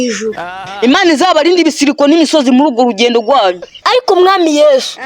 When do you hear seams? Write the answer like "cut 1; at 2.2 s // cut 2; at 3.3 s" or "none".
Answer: cut 1; at 3.8 s